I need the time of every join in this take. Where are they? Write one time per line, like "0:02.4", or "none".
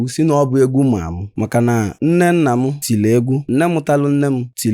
0:01.2